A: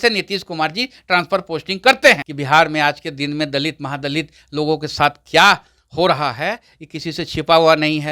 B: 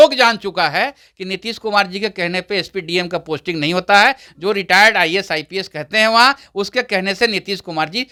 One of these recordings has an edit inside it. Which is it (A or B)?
A